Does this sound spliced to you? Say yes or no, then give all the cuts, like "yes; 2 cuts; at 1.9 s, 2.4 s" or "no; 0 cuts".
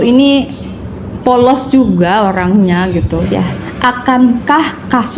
yes; 1 cut; at 3.2 s